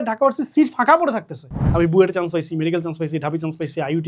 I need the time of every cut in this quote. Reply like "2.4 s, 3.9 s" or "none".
1.6 s